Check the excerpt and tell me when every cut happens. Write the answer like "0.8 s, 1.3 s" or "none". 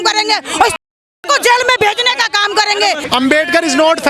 3.0 s